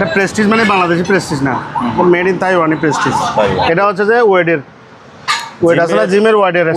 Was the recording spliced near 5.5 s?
no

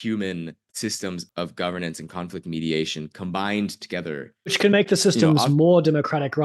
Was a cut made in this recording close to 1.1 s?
yes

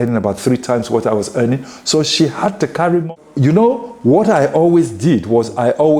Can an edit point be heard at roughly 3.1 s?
yes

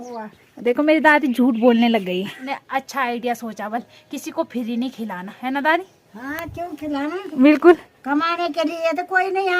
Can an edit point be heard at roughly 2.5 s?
yes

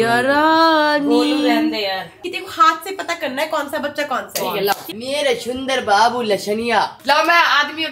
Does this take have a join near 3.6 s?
no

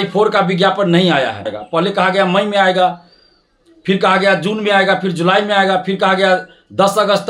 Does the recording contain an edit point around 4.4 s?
no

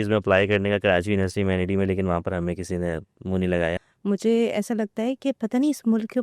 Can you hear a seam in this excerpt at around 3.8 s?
yes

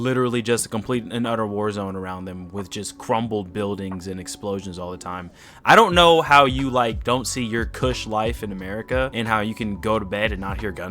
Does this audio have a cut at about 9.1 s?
yes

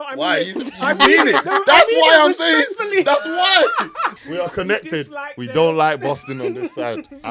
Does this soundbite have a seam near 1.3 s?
no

